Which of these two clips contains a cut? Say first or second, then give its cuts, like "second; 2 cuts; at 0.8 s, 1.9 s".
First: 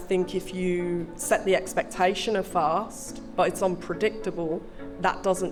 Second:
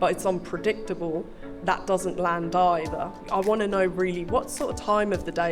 second; 1 cut; at 3.1 s